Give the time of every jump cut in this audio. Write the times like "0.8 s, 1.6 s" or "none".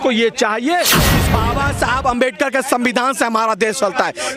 1.2 s